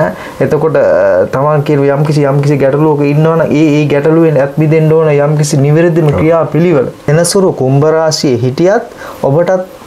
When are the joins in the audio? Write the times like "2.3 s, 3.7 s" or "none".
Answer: 7.0 s